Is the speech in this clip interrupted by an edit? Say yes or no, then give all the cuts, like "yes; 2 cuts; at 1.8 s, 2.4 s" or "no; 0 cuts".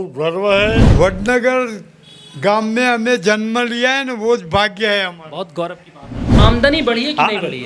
yes; 2 cuts; at 0.9 s, 6.3 s